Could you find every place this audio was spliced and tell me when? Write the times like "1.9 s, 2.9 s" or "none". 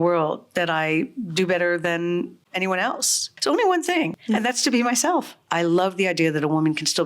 3.3 s, 4.2 s, 5.4 s